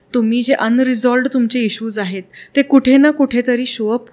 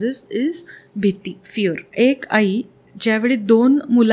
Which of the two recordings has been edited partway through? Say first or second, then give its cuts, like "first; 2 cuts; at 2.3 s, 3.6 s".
second; 1 cut; at 1.9 s